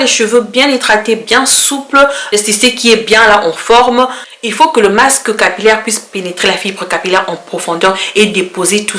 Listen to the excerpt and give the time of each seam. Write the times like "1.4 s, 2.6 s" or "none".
none